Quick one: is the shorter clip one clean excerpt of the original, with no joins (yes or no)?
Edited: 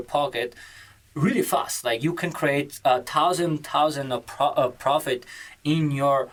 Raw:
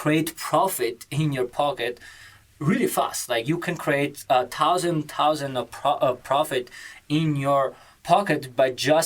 yes